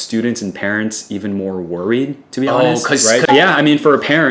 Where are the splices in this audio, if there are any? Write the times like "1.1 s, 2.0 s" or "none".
3.3 s